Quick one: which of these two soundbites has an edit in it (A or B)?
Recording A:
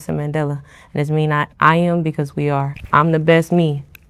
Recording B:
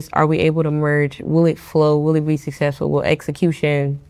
A